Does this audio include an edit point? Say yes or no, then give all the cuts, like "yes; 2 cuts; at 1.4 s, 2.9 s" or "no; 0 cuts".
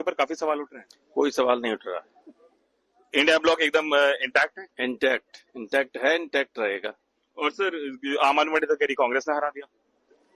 no; 0 cuts